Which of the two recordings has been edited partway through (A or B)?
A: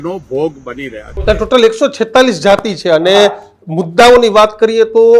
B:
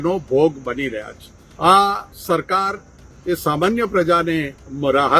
A